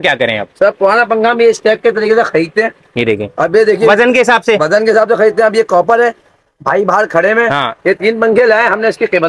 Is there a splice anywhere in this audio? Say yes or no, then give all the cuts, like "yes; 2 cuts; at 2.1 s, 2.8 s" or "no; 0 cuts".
no; 0 cuts